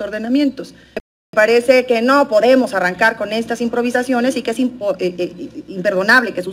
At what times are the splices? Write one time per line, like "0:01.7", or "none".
0:01.3